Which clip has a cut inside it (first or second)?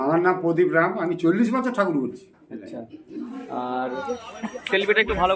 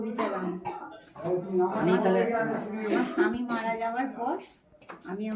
first